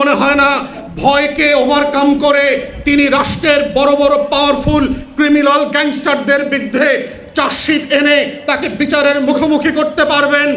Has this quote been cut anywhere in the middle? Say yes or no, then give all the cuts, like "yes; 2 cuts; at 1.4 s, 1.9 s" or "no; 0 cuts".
no; 0 cuts